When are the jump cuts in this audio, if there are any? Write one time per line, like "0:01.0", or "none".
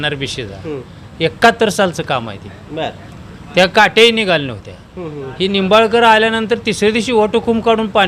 none